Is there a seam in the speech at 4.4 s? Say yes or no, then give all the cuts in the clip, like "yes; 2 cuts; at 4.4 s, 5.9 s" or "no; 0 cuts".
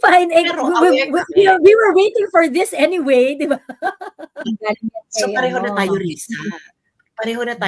yes; 1 cut; at 4.4 s